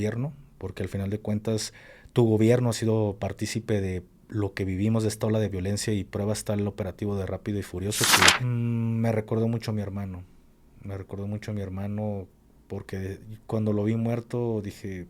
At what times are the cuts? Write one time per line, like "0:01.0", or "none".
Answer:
0:08.4